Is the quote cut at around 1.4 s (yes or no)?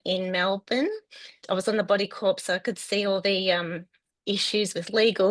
yes